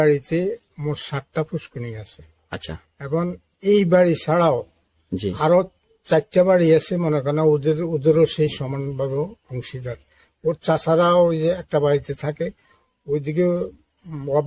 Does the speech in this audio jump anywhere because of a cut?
no; 0 cuts

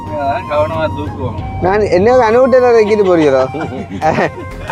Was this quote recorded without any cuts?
yes; 0 cuts

